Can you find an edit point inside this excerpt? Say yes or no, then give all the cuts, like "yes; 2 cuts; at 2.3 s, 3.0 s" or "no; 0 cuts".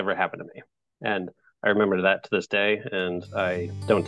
no; 0 cuts